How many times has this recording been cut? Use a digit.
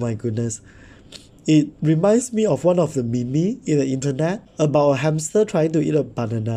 1